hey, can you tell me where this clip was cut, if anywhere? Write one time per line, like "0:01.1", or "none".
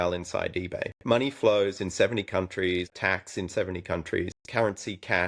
0:01.0
0:02.9
0:04.3